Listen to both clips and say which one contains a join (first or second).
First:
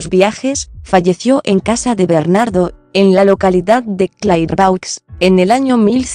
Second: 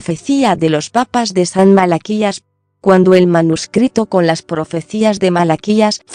first